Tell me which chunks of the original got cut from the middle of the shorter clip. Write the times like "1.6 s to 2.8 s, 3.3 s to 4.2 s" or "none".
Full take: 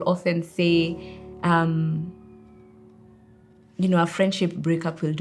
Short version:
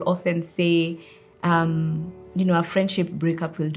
2.2 s to 3.6 s